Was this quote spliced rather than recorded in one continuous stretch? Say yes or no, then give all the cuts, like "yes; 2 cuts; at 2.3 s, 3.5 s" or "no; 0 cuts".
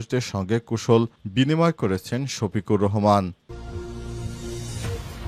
yes; 1 cut; at 3.4 s